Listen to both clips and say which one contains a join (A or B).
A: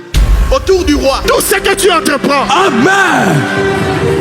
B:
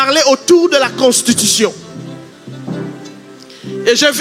A